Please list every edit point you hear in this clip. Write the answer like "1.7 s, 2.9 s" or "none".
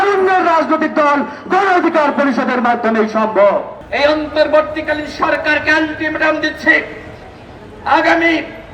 3.8 s